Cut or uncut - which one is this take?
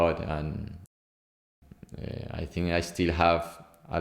cut